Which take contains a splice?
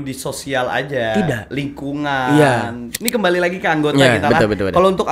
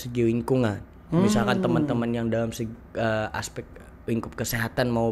first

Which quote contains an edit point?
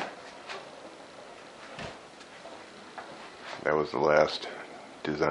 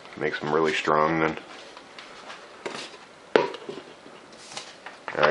first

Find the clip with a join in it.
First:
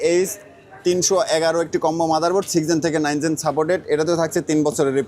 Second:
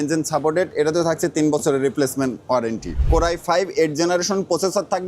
second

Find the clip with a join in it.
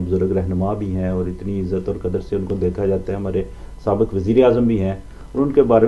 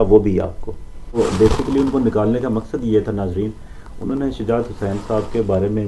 second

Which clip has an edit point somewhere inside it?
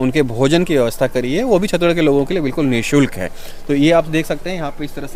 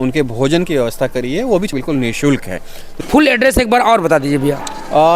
second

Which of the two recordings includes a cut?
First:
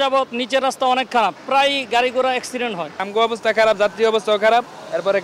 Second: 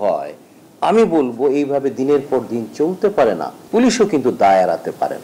first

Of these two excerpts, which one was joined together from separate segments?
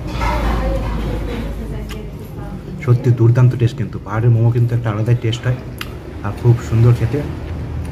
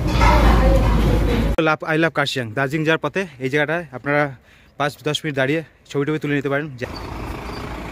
second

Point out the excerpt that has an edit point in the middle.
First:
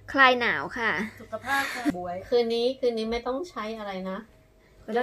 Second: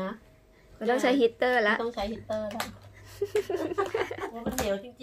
first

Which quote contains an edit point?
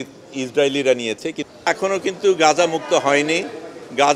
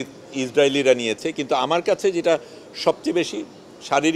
first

